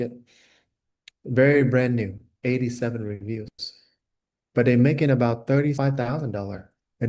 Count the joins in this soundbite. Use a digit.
2